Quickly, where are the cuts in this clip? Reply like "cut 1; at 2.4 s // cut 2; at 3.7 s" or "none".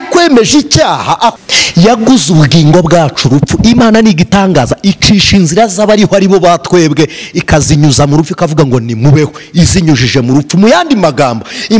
cut 1; at 1.4 s